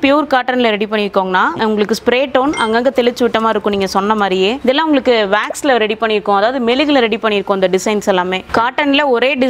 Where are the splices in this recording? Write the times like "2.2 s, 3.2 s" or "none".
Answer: 1.5 s, 4.6 s, 8.4 s